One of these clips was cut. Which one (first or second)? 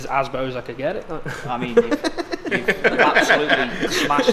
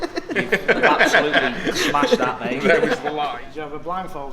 second